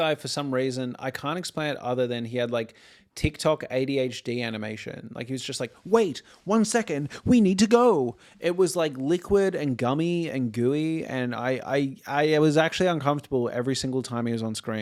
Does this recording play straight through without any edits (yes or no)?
yes